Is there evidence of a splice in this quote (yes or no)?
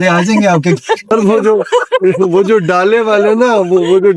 yes